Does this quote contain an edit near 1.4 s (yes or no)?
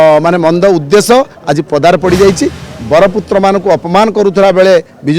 no